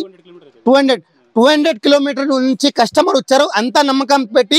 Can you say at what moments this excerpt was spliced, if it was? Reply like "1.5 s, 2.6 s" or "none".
none